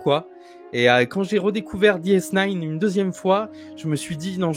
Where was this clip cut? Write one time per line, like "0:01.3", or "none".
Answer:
none